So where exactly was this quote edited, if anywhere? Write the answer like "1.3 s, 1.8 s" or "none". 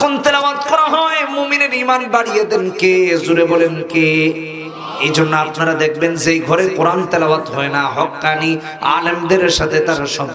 none